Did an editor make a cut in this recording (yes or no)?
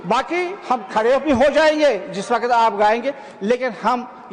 no